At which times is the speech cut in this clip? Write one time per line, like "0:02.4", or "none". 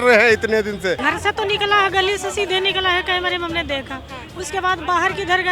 0:01.0